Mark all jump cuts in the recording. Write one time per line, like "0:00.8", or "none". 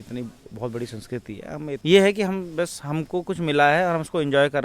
0:01.8